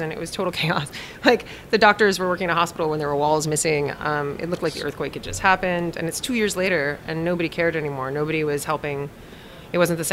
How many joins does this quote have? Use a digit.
0